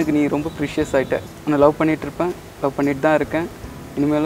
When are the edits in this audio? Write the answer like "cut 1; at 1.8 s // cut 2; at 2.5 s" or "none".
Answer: cut 1; at 1.3 s